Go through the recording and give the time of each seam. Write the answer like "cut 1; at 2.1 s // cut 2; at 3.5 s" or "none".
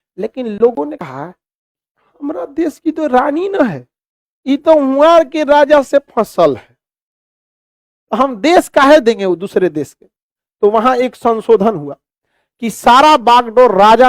cut 1; at 1.0 s